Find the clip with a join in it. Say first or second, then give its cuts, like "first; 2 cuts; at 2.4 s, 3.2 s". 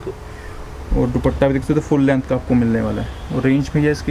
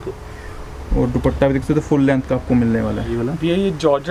second; 1 cut; at 3.1 s